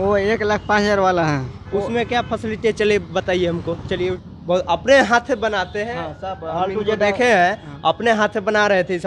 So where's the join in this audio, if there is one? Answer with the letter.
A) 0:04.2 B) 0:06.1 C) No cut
A